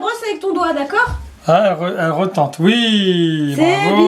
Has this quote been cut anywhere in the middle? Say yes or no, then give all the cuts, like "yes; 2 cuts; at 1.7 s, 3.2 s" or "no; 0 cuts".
yes; 1 cut; at 1.4 s